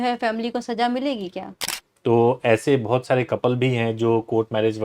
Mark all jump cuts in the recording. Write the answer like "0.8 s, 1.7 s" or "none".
1.6 s